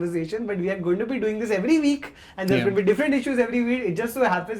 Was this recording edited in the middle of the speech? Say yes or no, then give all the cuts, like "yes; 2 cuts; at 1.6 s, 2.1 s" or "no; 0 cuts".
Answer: no; 0 cuts